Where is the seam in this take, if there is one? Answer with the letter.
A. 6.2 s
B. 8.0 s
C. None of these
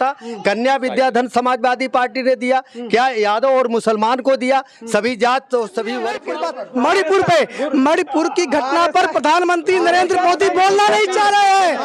A